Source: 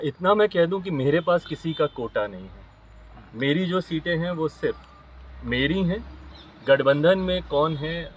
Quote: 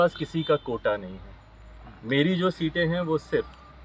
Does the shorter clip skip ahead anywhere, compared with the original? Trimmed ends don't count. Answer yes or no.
no